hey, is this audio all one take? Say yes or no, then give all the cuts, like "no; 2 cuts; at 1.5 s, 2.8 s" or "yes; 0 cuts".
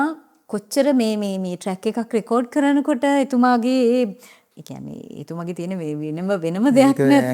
no; 1 cut; at 4.4 s